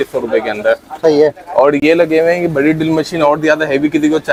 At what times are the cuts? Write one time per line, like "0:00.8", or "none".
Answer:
none